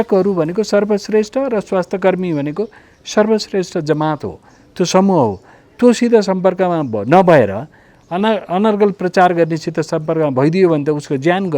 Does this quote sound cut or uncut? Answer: uncut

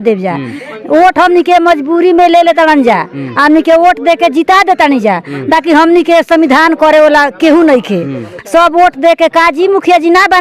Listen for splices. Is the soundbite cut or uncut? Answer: uncut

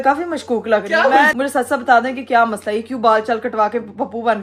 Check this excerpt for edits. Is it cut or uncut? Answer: cut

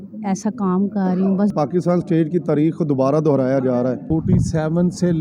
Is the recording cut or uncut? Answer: cut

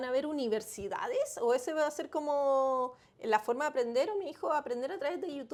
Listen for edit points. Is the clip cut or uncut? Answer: uncut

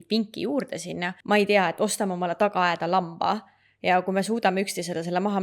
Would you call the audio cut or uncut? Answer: cut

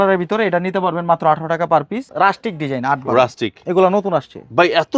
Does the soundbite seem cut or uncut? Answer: cut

